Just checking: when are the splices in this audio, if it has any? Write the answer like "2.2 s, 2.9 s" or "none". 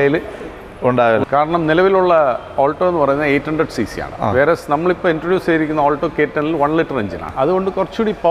1.2 s, 7.3 s